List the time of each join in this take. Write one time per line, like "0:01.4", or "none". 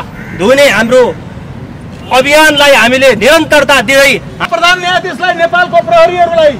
0:04.5